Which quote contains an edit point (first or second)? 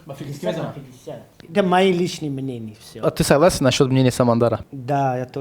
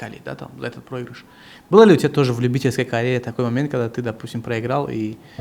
first